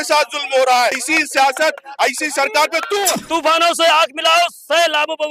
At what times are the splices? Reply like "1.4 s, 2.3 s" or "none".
1.0 s, 3.1 s

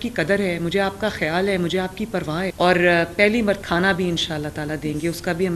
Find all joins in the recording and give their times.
2.5 s, 3.6 s

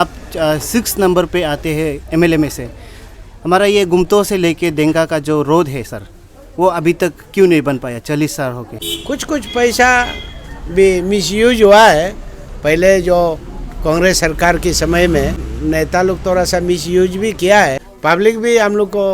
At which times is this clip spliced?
8.8 s, 15.5 s, 17.9 s

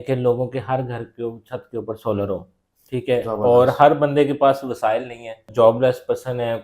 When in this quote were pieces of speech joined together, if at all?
5.5 s

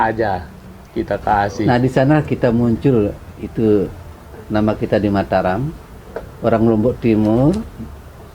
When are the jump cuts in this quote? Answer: none

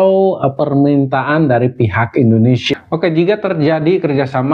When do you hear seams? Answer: 2.7 s

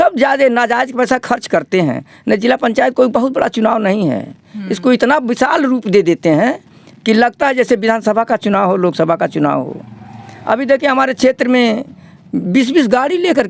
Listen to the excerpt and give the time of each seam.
none

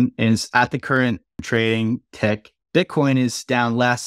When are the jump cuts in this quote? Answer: 1.4 s, 2.5 s

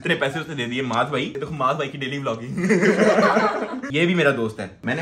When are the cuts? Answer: none

